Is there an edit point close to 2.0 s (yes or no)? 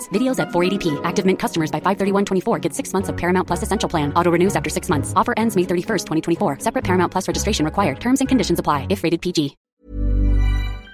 no